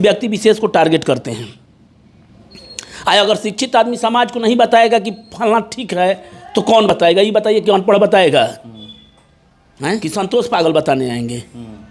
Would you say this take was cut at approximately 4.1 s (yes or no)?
no